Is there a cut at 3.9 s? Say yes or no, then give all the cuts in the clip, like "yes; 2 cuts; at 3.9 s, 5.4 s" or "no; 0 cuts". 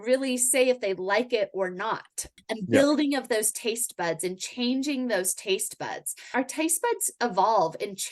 no; 2 cuts; at 2.3 s, 6.3 s